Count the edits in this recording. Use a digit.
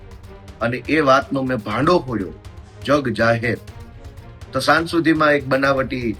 0